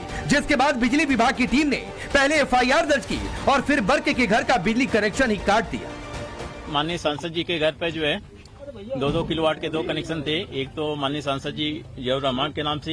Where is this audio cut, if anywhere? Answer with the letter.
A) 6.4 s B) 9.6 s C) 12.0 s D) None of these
B